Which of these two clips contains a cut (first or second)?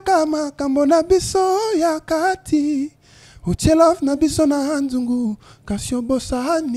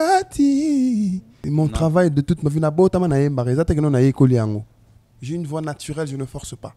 second